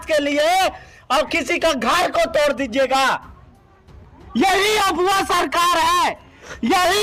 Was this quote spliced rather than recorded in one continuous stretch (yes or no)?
no